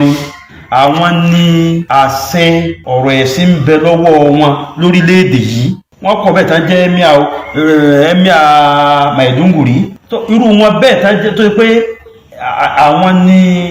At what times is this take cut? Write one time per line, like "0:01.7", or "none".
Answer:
0:01.8
0:02.8
0:05.9
0:10.0